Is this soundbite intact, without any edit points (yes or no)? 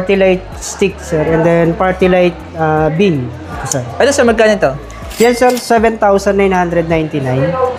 yes